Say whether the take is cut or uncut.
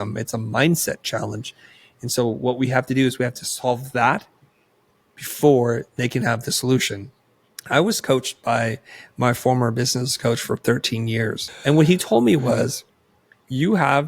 cut